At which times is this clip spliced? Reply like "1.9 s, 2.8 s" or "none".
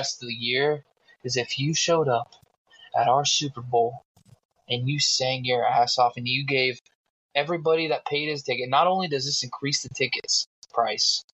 none